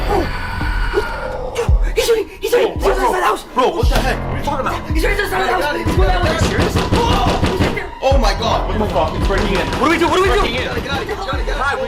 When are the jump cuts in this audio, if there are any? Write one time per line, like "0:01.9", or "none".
none